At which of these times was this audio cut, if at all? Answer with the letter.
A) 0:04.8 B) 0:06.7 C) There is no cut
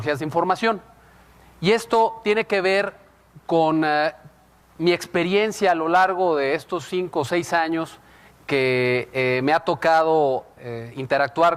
A